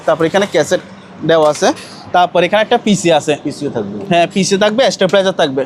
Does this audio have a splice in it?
no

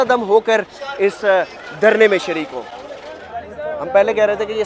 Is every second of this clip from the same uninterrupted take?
yes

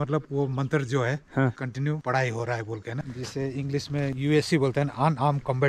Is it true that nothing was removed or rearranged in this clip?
no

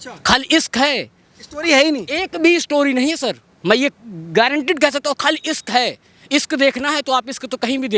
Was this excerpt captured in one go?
yes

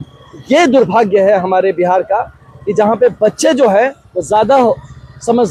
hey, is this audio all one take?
yes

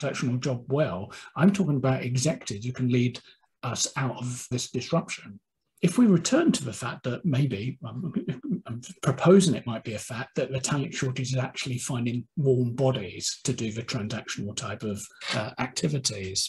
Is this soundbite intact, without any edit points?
no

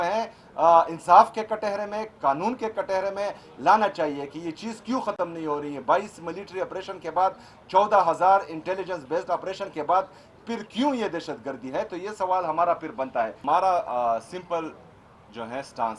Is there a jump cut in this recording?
yes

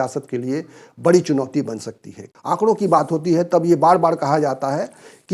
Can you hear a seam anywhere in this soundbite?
yes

